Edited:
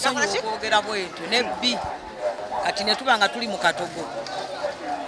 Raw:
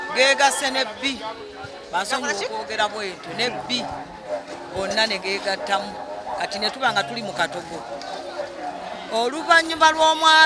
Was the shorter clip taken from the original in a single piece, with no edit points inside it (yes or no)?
no